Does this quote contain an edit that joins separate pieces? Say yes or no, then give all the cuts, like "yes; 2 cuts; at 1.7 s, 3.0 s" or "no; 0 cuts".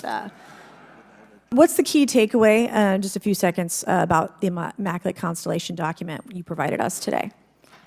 yes; 1 cut; at 1.5 s